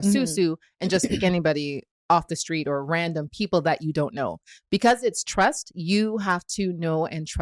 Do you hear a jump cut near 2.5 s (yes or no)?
no